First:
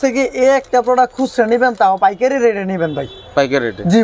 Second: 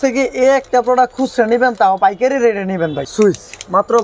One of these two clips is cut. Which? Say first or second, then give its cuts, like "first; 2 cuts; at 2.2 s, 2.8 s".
second; 1 cut; at 3.0 s